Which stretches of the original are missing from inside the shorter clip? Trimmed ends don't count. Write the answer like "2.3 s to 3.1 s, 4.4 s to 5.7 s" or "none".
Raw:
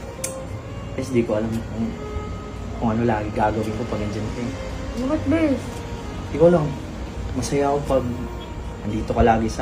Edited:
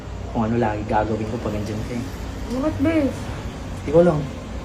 none